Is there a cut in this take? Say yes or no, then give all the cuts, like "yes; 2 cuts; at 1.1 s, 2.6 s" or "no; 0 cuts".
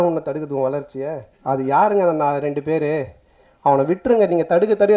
no; 0 cuts